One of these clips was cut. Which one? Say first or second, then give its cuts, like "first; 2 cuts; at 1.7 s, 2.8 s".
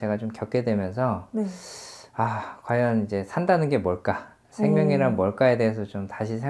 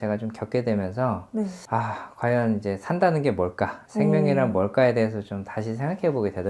second; 2 cuts; at 1.6 s, 3.8 s